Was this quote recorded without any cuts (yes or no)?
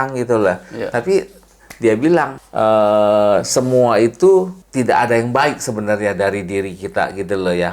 no